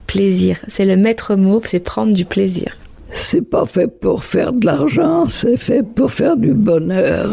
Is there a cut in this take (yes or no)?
yes